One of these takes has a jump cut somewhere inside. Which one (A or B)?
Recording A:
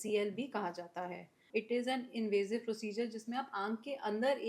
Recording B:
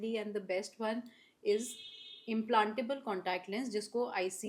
A